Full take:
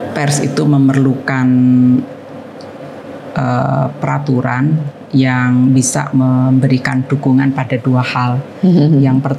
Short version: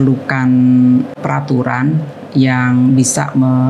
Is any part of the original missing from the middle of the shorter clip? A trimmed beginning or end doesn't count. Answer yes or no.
yes